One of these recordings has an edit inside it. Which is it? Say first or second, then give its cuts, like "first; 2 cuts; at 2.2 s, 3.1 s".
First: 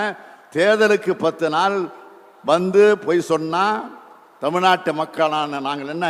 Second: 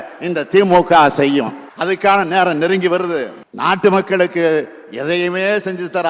second; 2 cuts; at 1.7 s, 3.4 s